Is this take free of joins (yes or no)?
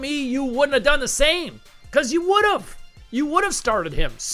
yes